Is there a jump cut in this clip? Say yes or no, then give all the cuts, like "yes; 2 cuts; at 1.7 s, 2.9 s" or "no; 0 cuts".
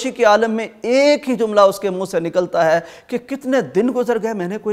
no; 0 cuts